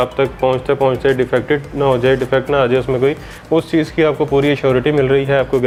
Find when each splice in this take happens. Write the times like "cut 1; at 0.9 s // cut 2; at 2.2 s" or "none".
none